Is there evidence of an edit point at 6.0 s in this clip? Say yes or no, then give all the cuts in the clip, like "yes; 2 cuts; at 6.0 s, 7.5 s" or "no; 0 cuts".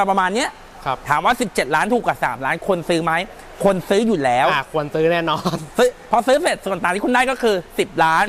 no; 0 cuts